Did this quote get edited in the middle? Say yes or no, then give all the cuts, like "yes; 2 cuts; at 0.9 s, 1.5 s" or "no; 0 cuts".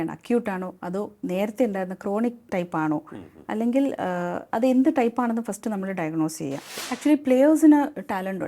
yes; 1 cut; at 6.7 s